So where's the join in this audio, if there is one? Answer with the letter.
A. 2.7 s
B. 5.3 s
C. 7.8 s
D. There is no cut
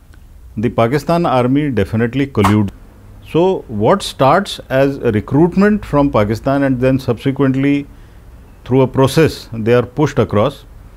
A